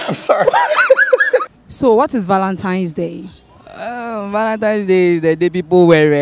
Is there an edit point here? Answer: yes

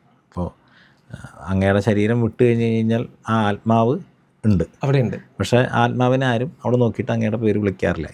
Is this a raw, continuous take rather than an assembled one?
yes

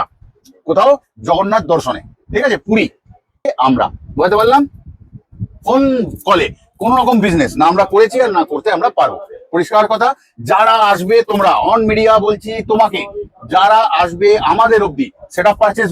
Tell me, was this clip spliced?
yes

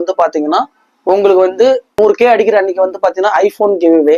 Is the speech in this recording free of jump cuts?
no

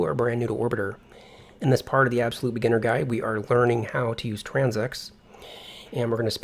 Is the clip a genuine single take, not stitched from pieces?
yes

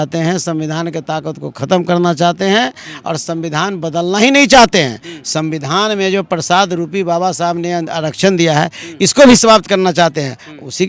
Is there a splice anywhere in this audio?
no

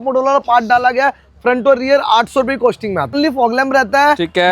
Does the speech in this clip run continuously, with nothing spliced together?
no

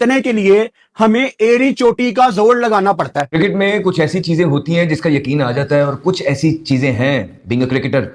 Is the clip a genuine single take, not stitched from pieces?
no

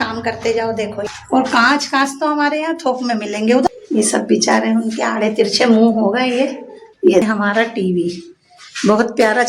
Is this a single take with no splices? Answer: no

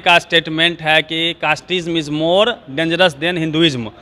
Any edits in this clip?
no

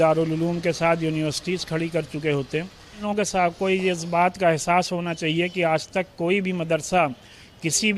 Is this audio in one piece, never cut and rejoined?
no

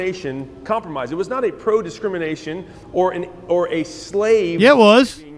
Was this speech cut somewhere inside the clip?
no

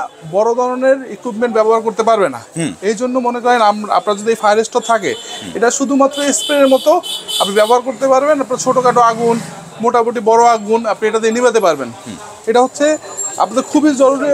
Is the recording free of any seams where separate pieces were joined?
yes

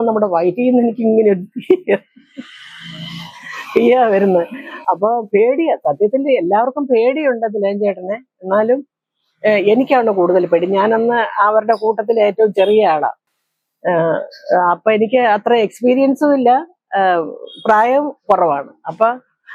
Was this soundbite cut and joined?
no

